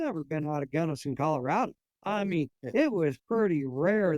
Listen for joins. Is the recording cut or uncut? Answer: cut